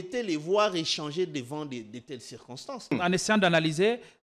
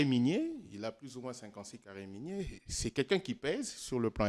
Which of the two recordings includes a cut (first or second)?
first